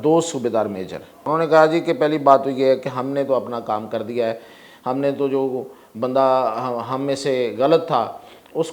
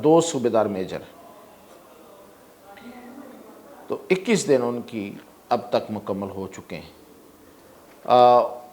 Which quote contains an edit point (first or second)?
first